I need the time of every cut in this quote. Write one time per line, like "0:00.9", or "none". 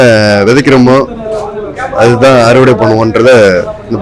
none